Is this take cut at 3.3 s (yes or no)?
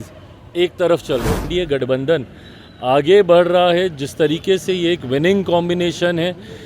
no